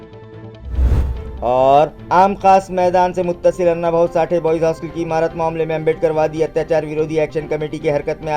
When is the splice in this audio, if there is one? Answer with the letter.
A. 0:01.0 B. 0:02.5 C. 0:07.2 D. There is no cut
A